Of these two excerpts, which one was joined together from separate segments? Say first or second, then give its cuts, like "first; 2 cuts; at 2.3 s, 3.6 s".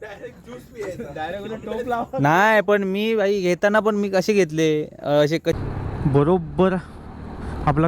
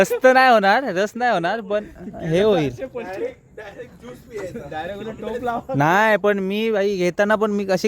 first; 1 cut; at 5.6 s